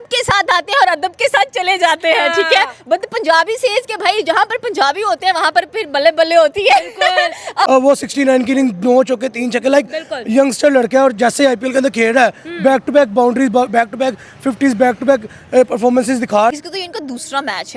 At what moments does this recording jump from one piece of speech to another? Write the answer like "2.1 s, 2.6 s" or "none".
7.7 s, 16.5 s